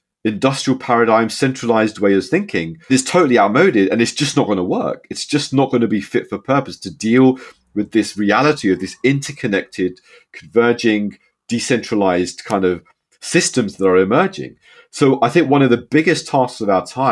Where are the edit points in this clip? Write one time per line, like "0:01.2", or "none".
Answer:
0:02.9